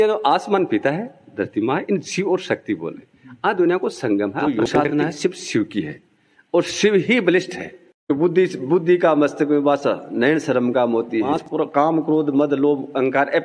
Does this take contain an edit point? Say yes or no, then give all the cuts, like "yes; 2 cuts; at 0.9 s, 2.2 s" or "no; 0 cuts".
yes; 3 cuts; at 4.7 s, 8.1 s, 11.4 s